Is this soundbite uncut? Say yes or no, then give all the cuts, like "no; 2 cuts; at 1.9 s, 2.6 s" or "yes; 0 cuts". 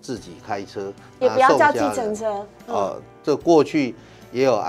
yes; 0 cuts